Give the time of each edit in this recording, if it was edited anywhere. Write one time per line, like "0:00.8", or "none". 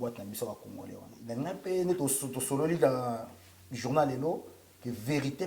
0:01.1